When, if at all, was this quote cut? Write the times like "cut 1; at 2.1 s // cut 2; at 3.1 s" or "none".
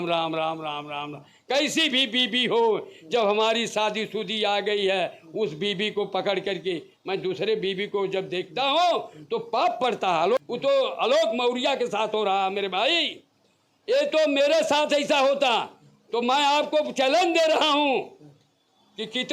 cut 1; at 10.4 s